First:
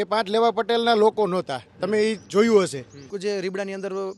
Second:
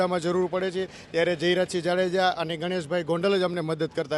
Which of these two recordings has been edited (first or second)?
first